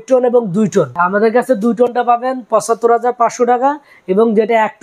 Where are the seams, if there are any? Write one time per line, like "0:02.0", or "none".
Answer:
0:01.0